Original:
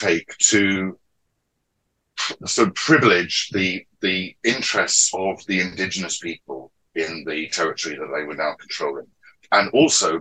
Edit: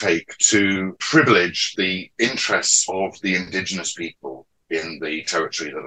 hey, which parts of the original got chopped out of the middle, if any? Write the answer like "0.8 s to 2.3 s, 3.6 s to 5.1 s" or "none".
1.0 s to 2.8 s, 3.4 s to 3.9 s